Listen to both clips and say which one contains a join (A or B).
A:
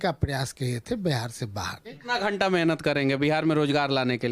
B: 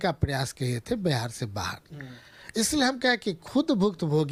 A